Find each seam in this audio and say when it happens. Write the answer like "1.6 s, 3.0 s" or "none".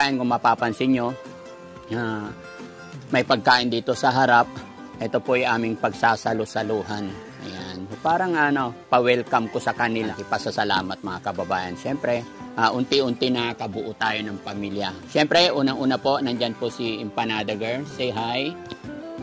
10.2 s, 15.0 s